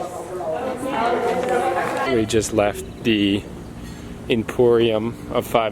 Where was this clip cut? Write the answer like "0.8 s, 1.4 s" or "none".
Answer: 2.1 s